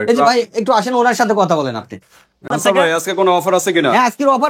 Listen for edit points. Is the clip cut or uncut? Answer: cut